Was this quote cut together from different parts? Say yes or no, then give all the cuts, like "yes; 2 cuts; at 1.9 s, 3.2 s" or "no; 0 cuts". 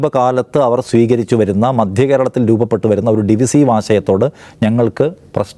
no; 0 cuts